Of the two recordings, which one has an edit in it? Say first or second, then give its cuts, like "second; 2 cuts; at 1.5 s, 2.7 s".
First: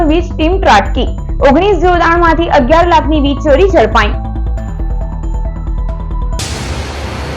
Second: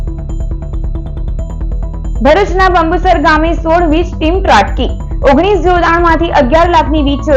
first; 1 cut; at 6.4 s